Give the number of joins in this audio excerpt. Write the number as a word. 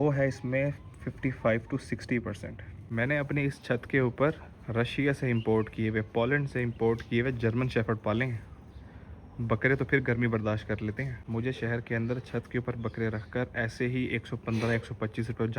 two